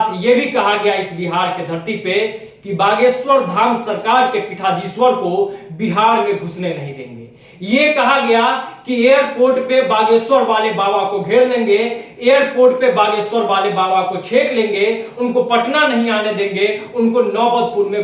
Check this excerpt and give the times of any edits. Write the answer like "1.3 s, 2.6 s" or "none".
none